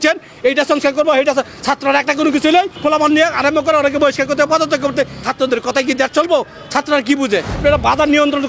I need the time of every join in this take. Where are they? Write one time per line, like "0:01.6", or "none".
0:02.7
0:05.2
0:07.6